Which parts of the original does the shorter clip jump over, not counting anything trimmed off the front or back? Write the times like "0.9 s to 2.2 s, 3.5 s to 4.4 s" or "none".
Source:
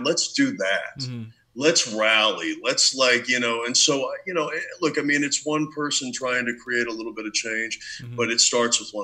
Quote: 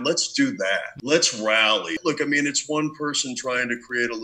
0.9 s to 1.4 s, 2.5 s to 4.7 s